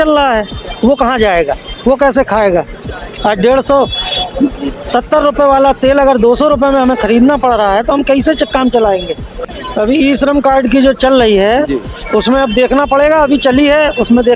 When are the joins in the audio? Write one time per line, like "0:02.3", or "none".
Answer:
0:09.3

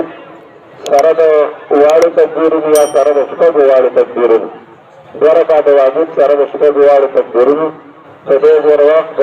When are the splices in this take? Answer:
none

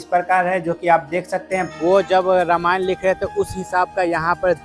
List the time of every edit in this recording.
0:01.7

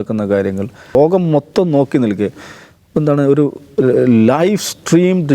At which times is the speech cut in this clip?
0:00.9

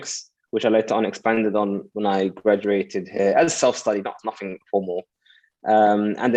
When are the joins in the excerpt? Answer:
none

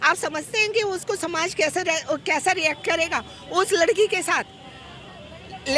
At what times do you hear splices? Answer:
none

